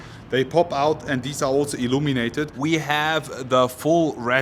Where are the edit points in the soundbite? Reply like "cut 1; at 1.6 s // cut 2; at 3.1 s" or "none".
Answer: cut 1; at 2.5 s